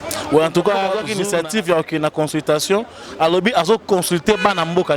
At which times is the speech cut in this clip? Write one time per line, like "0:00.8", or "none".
0:01.1